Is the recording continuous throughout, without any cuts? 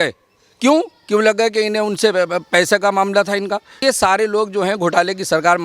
no; 1 cut; at 3.8 s

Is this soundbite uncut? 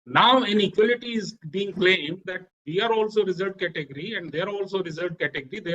yes; 0 cuts

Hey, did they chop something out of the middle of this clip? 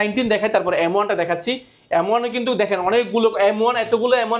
no; 0 cuts

